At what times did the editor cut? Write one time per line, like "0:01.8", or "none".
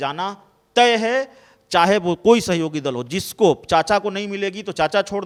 none